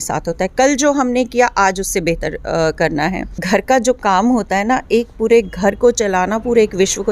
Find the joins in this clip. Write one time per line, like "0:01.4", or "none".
0:03.3